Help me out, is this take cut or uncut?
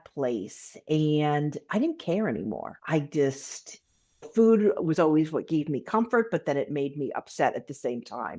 cut